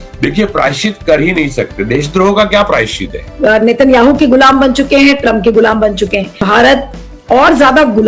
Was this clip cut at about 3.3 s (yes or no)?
yes